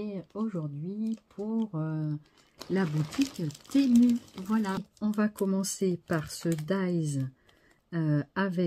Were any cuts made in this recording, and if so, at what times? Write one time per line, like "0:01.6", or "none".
0:04.9